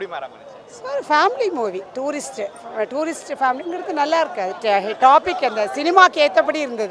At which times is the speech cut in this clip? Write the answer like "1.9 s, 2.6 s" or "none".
none